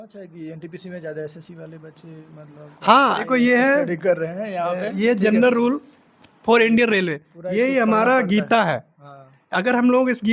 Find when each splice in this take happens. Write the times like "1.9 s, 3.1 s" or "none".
3.2 s